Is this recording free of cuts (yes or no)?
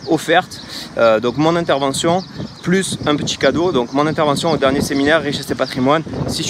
yes